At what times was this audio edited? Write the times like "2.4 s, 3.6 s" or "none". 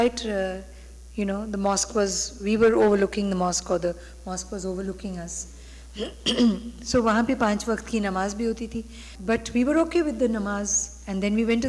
9.1 s